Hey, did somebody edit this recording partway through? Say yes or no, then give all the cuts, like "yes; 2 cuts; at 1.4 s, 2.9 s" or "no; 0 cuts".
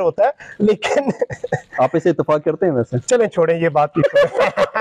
no; 0 cuts